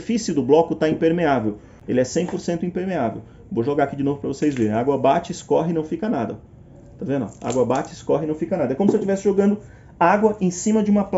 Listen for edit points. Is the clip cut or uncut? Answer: cut